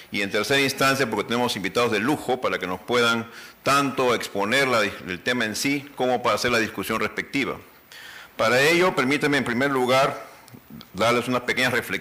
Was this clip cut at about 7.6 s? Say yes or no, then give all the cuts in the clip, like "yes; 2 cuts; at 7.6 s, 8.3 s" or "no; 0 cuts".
yes; 1 cut; at 7.6 s